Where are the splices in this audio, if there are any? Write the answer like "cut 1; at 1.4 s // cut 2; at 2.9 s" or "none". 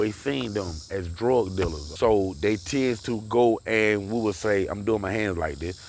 cut 1; at 1.8 s

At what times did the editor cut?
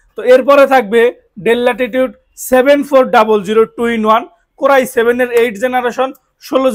none

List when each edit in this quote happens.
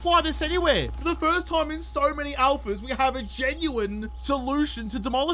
cut 1; at 0.9 s // cut 2; at 4.1 s

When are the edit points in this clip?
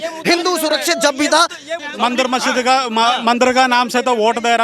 cut 1; at 1.7 s

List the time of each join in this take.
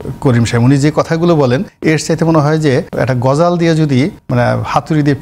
cut 1; at 1.7 s // cut 2; at 2.9 s // cut 3; at 4.2 s

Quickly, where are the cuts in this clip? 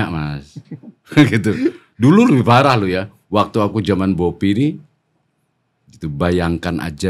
none

